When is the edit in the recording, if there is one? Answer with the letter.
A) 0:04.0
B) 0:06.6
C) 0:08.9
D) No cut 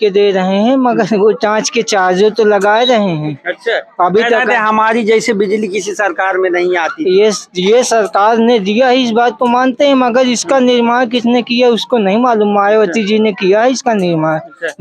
D